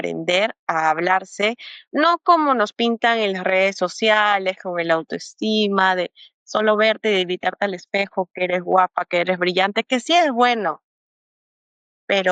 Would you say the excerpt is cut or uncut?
uncut